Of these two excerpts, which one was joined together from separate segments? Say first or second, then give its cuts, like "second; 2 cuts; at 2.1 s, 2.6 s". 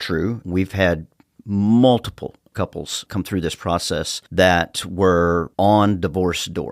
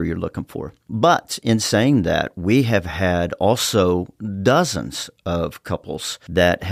first; 2 cuts; at 2.4 s, 4.2 s